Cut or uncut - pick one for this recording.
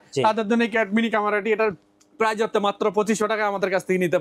uncut